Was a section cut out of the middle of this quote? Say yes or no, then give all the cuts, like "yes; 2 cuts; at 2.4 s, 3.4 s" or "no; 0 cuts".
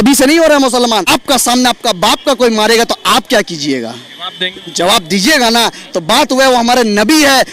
yes; 1 cut; at 1.1 s